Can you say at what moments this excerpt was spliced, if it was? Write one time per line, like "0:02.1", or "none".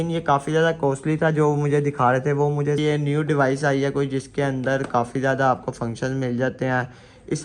0:02.8

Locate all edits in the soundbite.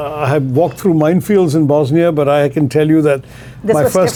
none

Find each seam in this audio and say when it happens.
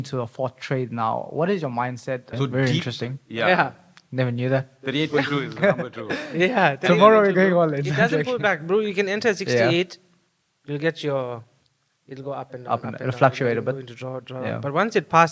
0:02.3

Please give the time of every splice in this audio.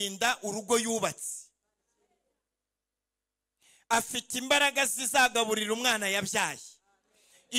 none

